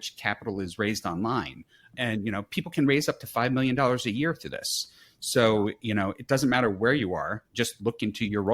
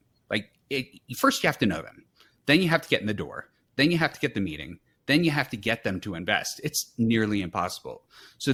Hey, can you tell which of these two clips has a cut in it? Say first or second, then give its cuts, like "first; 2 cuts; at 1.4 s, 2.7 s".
first; 1 cut; at 7.5 s